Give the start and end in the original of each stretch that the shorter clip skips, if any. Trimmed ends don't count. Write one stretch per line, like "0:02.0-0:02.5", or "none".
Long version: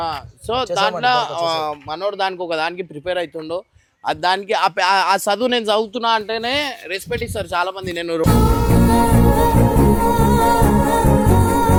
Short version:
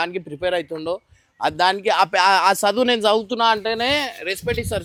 none